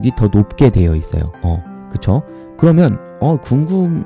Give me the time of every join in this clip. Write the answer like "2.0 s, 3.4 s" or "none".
1.3 s, 2.4 s

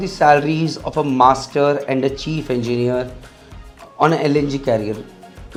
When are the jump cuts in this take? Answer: none

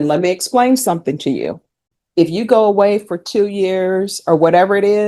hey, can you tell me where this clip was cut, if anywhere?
1.9 s

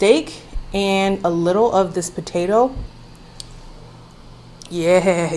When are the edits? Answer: 2.9 s

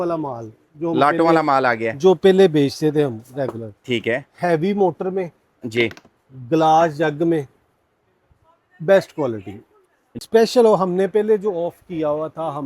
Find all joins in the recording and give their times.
10.2 s

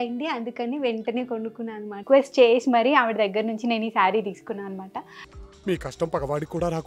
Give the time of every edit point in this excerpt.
2.0 s

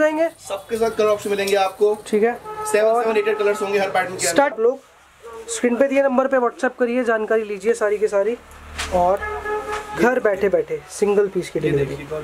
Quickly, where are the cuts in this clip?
4.5 s

